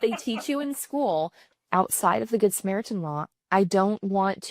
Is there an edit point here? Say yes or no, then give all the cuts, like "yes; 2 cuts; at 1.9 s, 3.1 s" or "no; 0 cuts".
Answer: yes; 2 cuts; at 1.5 s, 3.3 s